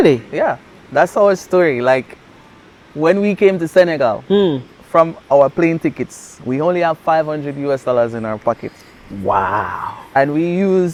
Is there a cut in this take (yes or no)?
no